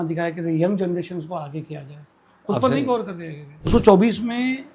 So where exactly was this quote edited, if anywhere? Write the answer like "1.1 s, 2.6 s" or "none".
3.7 s